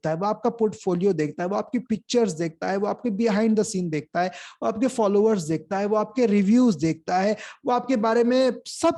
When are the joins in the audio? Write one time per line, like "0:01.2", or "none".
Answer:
none